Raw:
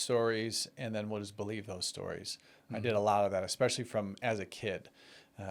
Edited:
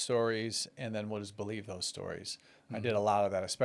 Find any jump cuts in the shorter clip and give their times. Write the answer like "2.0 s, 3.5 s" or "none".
none